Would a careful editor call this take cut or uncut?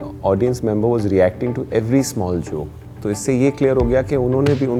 uncut